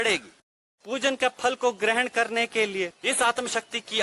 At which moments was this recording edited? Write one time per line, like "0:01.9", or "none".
0:00.8
0:03.0